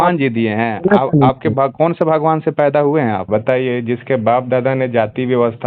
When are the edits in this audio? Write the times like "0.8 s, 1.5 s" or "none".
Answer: 3.2 s